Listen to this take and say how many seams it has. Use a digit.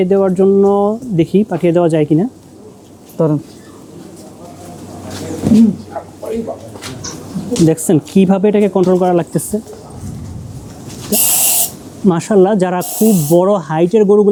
0